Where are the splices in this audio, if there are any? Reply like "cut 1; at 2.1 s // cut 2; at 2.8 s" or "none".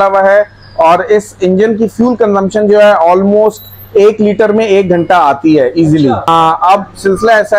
cut 1; at 6.3 s